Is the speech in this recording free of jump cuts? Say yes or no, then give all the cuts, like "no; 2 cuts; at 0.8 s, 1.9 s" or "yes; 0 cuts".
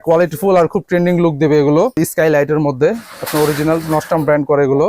no; 1 cut; at 2.0 s